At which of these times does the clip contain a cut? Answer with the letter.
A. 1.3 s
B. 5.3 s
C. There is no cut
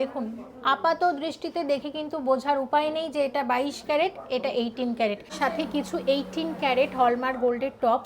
B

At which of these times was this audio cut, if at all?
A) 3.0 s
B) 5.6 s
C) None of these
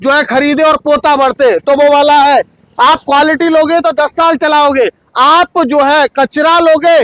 C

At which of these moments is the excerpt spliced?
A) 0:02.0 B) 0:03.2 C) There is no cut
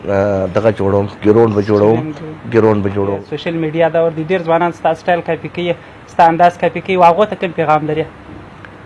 B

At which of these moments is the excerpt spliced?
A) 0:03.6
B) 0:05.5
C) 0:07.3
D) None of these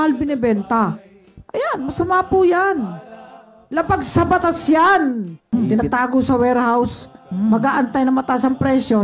B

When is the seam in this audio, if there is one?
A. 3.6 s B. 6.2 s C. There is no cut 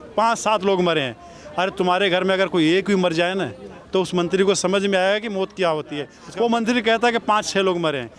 B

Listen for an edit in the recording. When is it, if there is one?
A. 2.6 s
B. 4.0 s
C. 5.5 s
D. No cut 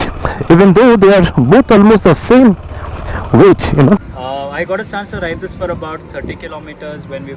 B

